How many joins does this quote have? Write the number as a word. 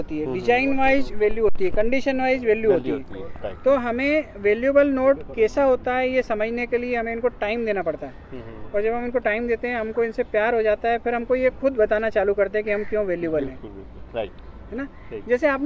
zero